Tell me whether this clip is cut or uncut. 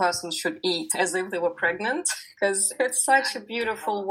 cut